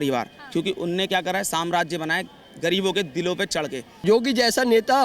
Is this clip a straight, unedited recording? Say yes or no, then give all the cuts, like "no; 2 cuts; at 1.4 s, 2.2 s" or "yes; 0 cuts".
no; 1 cut; at 3.9 s